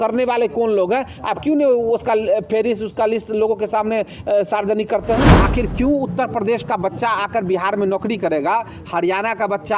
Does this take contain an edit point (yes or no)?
yes